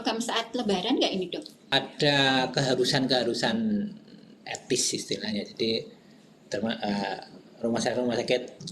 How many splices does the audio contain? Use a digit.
1